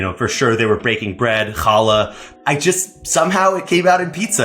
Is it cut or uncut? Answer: cut